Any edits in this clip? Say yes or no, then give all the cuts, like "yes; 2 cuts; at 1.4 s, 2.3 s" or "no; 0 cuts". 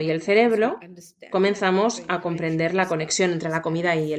no; 0 cuts